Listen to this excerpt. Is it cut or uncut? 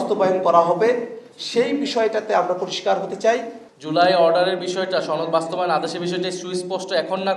cut